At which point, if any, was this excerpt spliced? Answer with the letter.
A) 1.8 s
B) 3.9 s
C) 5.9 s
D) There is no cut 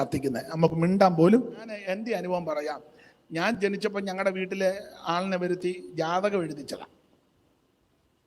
A